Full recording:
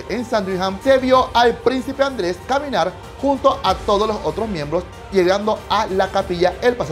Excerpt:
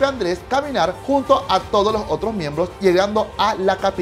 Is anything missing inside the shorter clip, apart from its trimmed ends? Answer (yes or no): yes